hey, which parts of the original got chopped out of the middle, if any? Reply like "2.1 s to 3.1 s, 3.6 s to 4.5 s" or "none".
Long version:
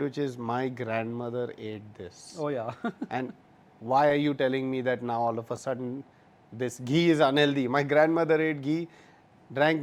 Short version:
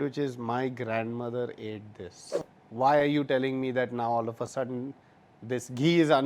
2.3 s to 3.4 s